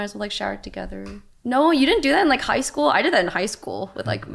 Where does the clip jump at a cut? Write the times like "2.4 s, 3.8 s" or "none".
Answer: 1.2 s